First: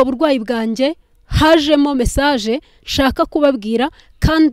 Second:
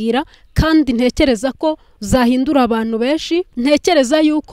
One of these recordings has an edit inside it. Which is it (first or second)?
second